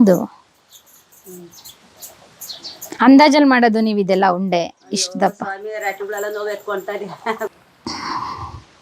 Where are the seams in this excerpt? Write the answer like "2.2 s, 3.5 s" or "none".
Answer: 7.5 s